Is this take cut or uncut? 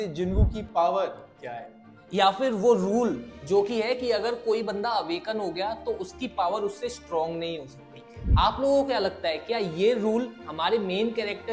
uncut